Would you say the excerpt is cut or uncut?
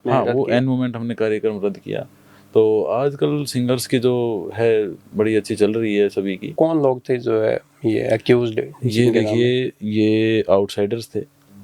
cut